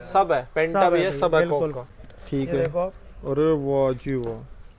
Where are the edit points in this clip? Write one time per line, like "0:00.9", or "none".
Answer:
0:01.8